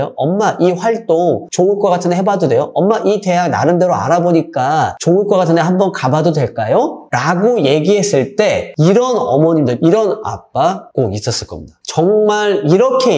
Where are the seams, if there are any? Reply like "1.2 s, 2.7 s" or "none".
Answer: 11.7 s